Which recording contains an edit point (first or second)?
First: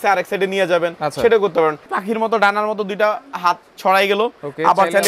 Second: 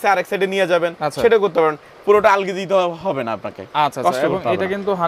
first